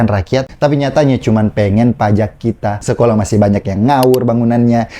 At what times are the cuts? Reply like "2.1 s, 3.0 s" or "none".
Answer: 2.8 s